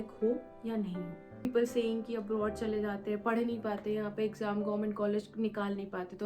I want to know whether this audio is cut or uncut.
cut